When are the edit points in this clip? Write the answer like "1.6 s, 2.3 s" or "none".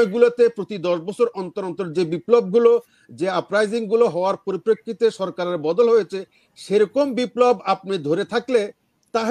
none

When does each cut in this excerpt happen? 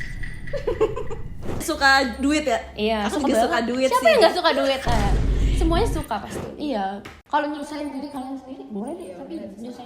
1.6 s, 6.3 s

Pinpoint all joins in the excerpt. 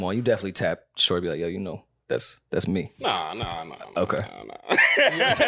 2.9 s

